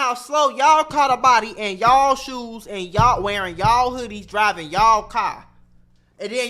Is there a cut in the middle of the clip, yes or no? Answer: no